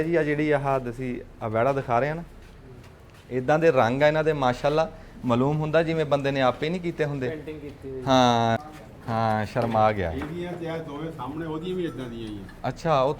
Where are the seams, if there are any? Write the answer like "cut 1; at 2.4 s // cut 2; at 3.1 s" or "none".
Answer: cut 1; at 8.6 s